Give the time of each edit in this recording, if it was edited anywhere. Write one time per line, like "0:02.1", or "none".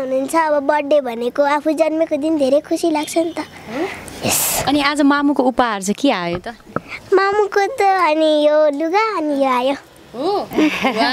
none